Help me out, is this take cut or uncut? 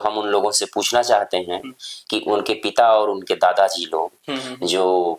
uncut